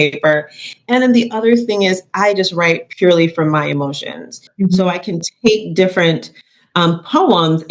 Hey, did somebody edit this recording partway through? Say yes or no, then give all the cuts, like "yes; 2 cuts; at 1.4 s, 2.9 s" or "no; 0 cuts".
yes; 1 cut; at 4.4 s